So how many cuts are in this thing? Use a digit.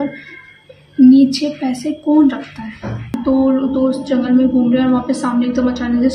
1